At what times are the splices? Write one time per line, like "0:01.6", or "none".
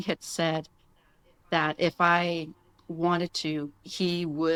none